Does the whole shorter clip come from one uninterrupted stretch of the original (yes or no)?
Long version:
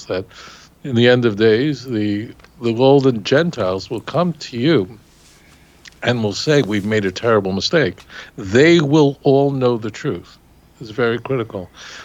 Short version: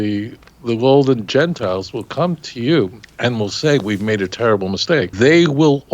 no